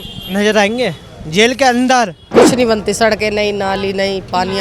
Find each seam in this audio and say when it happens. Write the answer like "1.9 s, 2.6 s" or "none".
2.2 s